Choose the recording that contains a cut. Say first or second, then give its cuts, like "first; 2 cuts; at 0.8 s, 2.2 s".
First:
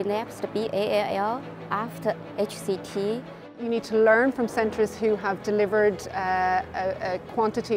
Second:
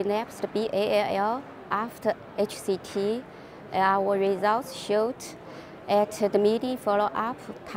first; 1 cut; at 3.6 s